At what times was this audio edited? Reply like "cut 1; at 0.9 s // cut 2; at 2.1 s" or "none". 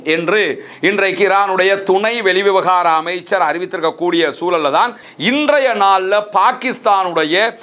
cut 1; at 5.0 s